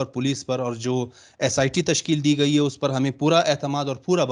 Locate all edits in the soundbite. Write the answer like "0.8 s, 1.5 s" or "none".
none